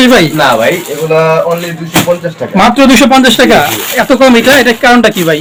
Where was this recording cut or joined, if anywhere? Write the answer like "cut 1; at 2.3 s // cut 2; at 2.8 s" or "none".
none